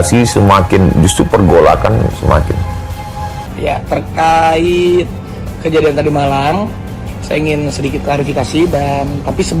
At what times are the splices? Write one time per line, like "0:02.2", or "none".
none